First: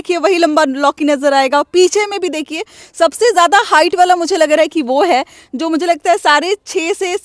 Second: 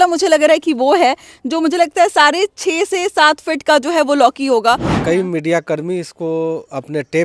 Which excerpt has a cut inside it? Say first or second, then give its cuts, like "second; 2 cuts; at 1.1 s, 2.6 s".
second; 1 cut; at 5.0 s